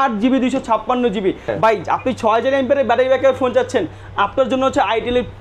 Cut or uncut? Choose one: cut